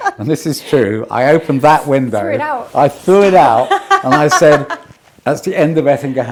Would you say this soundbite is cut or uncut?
uncut